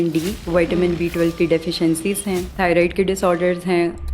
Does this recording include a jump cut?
yes; 1 cut; at 2.5 s

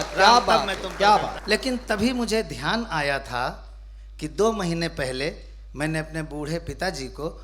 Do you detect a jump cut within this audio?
yes; 1 cut; at 1.4 s

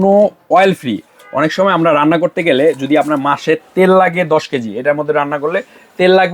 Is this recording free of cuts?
yes; 0 cuts

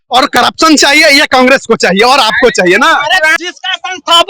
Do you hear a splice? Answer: yes; 1 cut; at 3.4 s

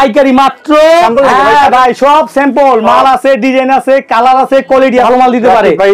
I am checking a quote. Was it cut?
yes; 2 cuts; at 1.0 s, 5.0 s

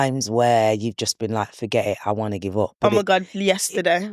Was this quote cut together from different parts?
no; 0 cuts

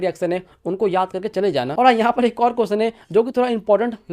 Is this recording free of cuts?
yes; 0 cuts

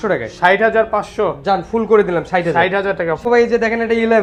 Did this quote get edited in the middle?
no; 0 cuts

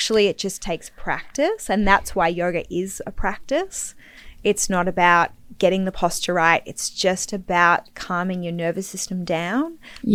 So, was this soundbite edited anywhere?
no; 0 cuts

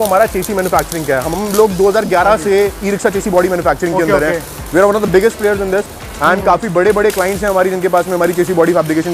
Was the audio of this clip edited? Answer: no; 0 cuts

